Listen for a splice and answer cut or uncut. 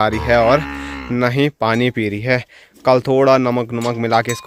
uncut